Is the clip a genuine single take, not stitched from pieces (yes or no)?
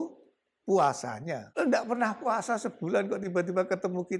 no